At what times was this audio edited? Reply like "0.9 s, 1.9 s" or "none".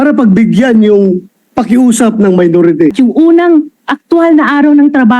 2.9 s